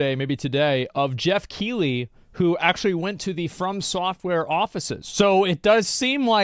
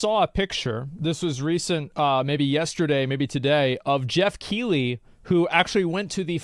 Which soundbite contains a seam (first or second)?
first